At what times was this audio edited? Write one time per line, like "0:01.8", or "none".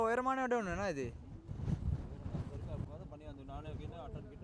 0:02.9